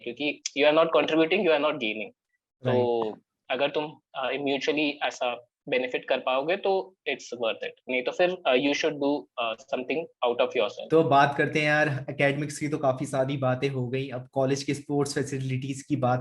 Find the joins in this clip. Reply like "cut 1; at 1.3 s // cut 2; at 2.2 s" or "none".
none